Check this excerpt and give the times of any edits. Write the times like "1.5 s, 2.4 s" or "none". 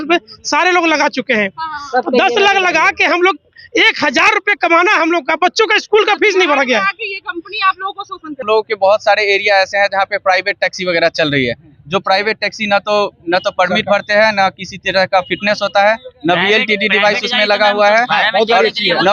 8.4 s